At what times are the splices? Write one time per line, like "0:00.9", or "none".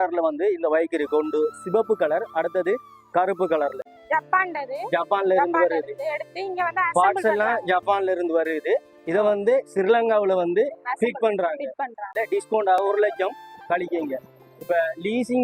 0:04.0
0:12.1